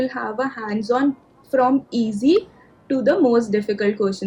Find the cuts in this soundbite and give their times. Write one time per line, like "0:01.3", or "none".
none